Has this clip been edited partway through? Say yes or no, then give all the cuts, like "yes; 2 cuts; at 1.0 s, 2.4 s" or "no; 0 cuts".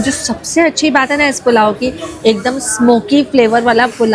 no; 0 cuts